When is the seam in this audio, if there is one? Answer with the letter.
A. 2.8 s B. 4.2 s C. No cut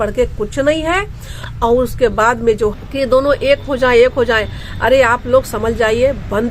A